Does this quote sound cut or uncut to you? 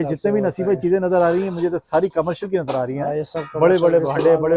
uncut